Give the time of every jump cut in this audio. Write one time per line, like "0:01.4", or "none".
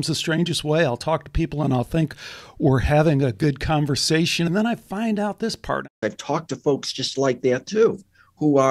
0:04.5
0:05.9